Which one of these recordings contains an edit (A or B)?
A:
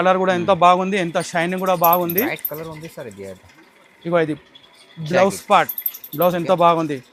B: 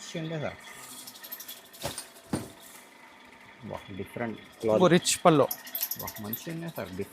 B